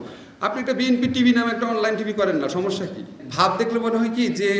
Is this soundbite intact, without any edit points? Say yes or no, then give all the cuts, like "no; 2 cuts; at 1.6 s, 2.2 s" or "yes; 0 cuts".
no; 1 cut; at 3.2 s